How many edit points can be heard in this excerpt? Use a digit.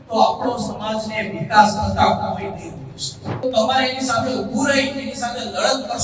1